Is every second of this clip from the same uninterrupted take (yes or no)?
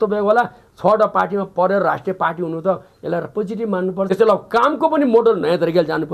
no